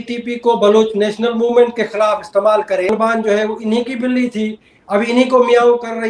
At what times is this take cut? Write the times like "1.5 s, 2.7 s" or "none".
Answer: 2.9 s